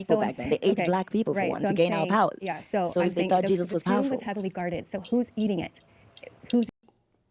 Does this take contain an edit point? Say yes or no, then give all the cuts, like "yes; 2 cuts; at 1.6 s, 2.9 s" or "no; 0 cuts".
no; 0 cuts